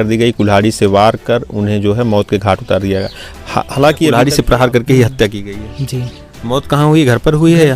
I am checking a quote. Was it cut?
yes; 1 cut; at 4.1 s

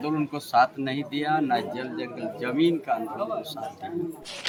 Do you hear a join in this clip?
no; 0 cuts

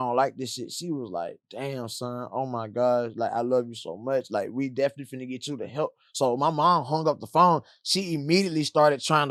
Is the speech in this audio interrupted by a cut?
no; 0 cuts

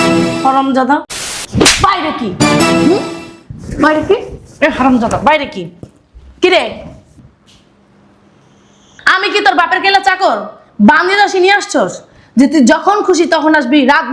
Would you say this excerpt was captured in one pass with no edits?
no; 1 cut; at 1.4 s

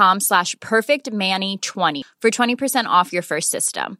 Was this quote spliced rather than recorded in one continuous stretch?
yes; 1 cut; at 2.0 s

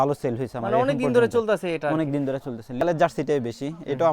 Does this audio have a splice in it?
yes; 1 cut; at 2.8 s

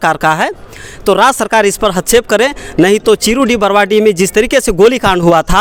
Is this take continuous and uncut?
yes; 0 cuts

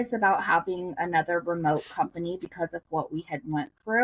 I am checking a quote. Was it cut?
no; 0 cuts

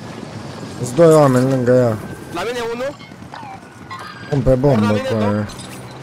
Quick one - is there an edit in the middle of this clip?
no; 0 cuts

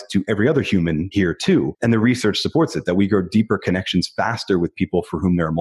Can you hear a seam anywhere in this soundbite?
yes; 1 cut; at 1.3 s

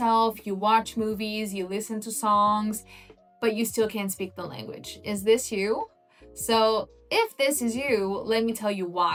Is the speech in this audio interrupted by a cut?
no; 0 cuts

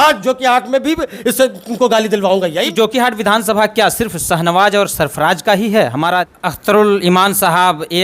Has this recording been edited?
yes; 2 cuts; at 2.5 s, 6.3 s

